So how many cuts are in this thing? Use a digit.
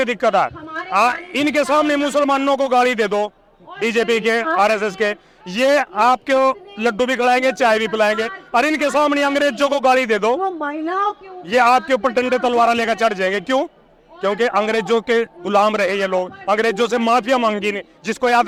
0